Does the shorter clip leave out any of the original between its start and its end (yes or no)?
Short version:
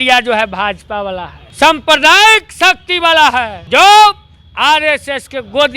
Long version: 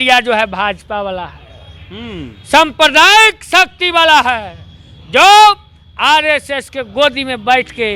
yes